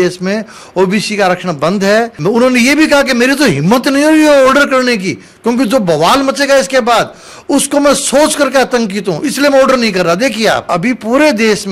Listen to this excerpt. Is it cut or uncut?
cut